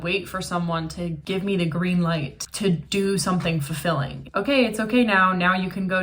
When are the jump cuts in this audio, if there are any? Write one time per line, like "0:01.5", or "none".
0:01.2
0:02.3
0:04.2

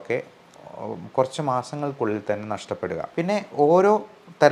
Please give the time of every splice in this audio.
0:03.1

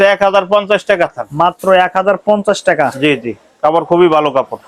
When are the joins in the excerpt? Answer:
none

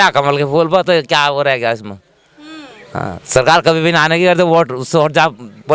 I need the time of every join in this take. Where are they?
none

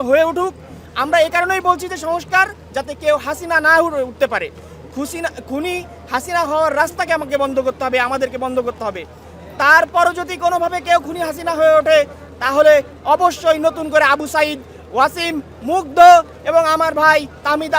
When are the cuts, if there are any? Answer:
none

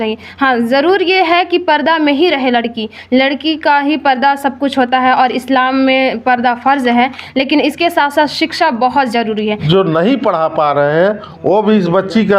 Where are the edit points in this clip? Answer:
0:09.6

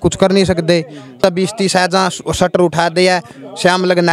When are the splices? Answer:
0:01.2

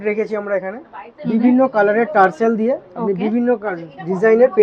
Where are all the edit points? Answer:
none

